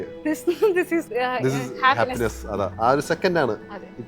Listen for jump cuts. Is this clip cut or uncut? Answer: cut